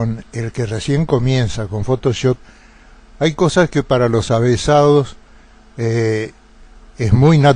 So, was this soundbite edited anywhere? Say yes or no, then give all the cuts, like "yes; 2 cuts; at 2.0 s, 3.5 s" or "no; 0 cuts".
yes; 1 cut; at 1.8 s